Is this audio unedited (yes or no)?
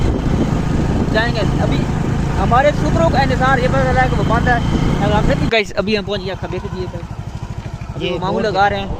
no